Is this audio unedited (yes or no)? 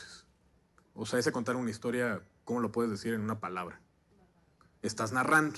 no